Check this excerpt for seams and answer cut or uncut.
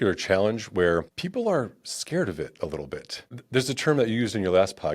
cut